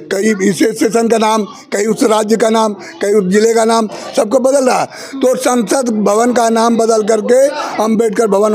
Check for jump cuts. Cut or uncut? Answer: uncut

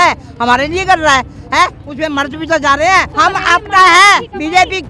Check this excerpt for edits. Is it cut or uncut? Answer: cut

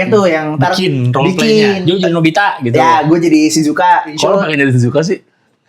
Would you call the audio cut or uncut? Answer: cut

